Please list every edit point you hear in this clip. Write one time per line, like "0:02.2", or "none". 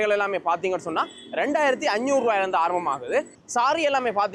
none